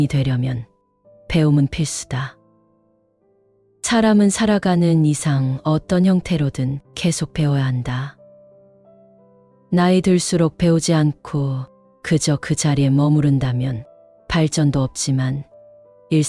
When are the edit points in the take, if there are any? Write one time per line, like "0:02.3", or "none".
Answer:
none